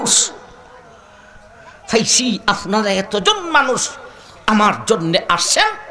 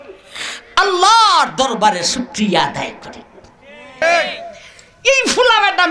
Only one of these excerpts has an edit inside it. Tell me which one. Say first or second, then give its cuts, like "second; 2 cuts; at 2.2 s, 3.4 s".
second; 1 cut; at 4.0 s